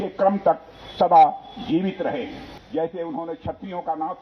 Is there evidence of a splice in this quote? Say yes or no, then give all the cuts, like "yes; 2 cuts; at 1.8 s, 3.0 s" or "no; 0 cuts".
yes; 1 cut; at 2.5 s